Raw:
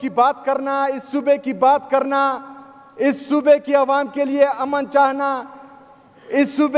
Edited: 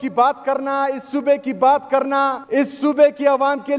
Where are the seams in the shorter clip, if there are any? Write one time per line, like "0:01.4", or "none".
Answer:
0:02.4